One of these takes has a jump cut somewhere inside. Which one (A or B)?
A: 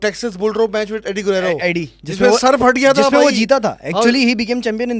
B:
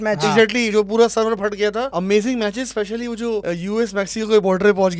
B